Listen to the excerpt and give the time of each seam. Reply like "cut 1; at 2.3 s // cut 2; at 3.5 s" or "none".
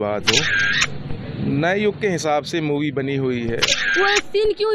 cut 1; at 3.8 s